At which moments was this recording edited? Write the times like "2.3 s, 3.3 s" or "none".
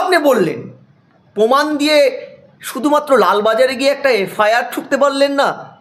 none